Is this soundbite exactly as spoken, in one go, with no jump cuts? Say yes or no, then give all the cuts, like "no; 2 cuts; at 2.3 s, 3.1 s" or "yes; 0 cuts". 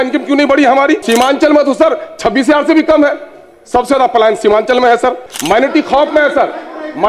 no; 2 cuts; at 1.0 s, 5.3 s